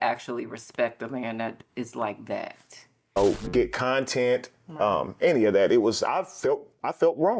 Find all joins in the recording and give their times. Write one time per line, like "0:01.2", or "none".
0:03.1